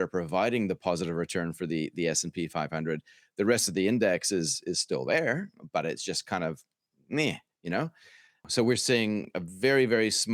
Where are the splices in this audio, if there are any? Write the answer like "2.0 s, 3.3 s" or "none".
8.4 s